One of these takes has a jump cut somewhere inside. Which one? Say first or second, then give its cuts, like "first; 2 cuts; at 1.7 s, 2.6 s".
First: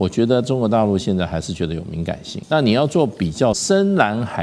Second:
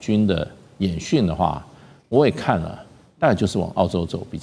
first; 2 cuts; at 2.4 s, 3.6 s